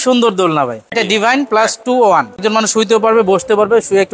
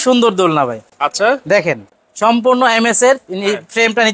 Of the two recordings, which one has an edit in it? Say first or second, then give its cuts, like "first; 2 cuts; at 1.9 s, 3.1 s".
first; 2 cuts; at 0.9 s, 2.4 s